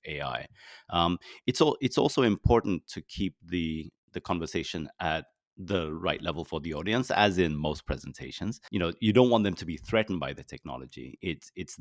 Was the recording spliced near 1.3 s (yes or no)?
no